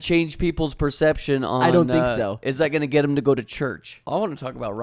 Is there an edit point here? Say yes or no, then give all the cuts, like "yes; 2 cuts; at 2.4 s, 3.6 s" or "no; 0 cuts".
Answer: yes; 1 cut; at 3.9 s